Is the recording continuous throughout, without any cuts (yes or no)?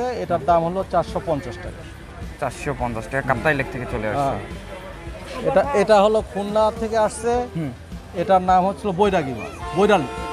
yes